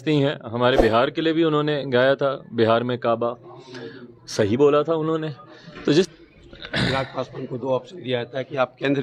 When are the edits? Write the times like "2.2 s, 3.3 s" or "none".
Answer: 6.1 s